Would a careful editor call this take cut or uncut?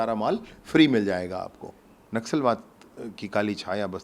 cut